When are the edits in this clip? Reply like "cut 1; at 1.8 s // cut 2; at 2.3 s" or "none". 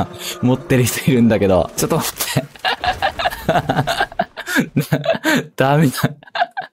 cut 1; at 1.7 s